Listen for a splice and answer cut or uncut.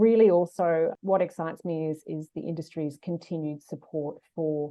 cut